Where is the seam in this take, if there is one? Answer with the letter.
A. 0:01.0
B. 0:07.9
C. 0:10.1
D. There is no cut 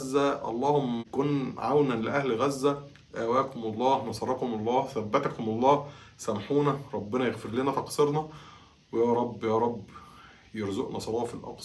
A